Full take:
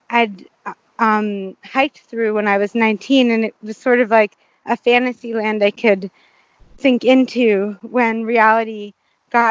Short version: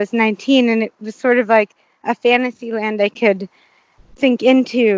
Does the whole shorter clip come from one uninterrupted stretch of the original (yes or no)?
yes